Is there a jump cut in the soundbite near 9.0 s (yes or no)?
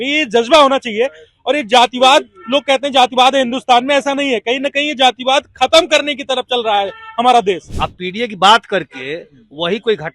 no